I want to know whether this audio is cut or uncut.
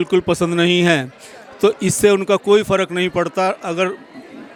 uncut